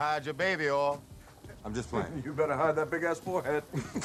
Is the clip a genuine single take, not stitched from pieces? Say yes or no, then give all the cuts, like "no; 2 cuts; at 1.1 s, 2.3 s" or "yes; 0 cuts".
yes; 0 cuts